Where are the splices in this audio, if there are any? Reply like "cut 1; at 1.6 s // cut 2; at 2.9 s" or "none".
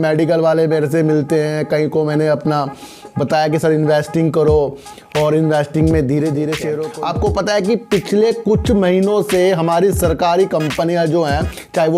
cut 1; at 6.8 s